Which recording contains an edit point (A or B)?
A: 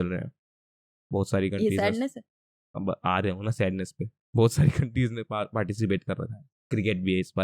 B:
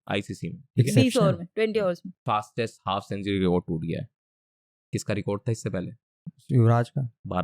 B